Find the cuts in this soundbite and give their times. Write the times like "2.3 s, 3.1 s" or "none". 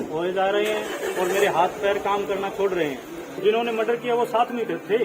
3.3 s

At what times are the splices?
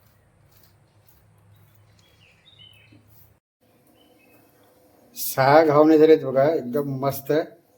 3.5 s

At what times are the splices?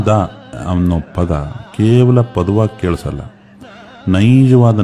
none

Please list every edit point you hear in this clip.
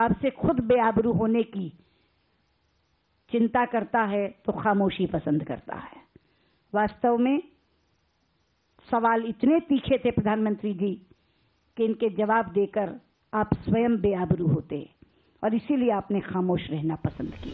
none

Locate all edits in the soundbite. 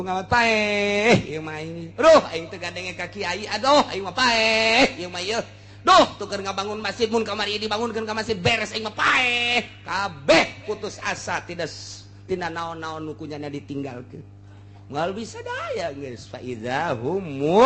none

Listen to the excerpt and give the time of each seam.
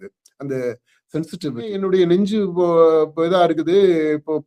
1.8 s

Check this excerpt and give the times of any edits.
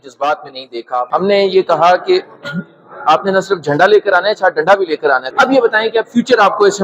1.1 s, 5.3 s

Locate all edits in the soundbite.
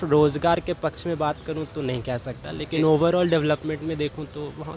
none

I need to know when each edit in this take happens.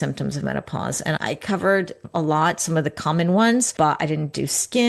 3.7 s

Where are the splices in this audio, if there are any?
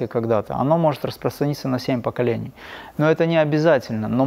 none

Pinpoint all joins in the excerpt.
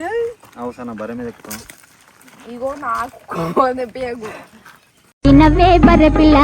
none

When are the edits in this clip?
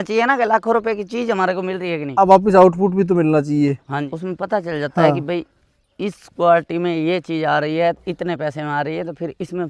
4.1 s

